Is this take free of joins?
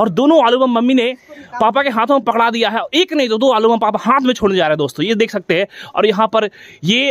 yes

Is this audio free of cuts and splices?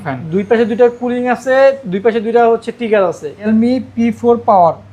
no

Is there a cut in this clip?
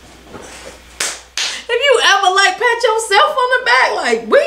no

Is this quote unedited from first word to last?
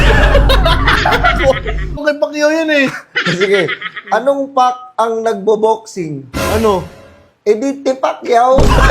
no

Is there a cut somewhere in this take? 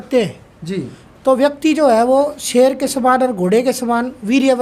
no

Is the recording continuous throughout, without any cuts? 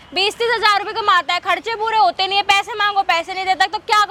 yes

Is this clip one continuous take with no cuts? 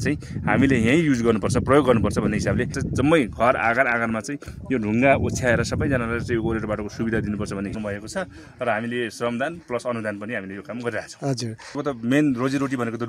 no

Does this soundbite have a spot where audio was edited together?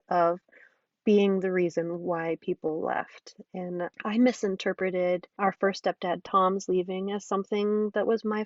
yes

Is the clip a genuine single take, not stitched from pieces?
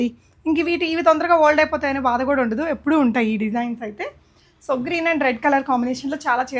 yes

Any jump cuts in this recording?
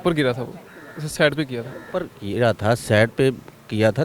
no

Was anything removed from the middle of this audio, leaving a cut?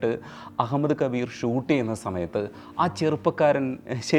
no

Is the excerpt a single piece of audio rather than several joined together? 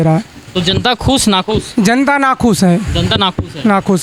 yes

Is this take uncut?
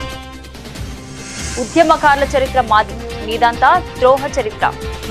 no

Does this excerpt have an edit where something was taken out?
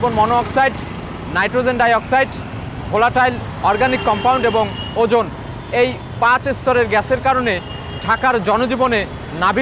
no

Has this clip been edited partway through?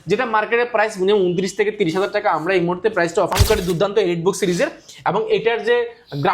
yes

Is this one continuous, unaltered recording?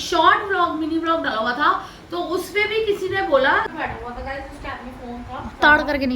no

